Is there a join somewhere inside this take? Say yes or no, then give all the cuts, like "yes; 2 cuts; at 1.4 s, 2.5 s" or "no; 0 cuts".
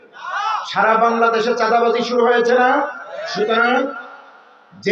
yes; 1 cut; at 3.2 s